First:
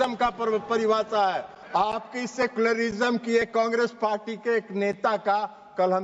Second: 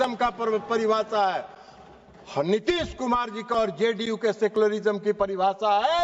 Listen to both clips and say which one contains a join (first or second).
first